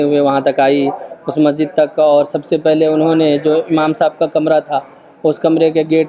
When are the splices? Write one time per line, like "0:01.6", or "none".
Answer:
none

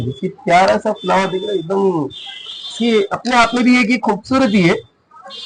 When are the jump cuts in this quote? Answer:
none

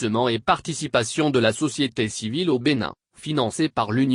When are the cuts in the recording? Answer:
0:03.1

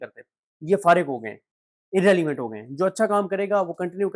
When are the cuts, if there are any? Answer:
none

